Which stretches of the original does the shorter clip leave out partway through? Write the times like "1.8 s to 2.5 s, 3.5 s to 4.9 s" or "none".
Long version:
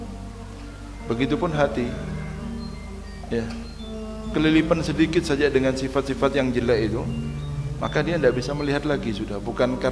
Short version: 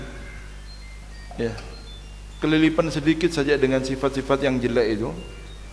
none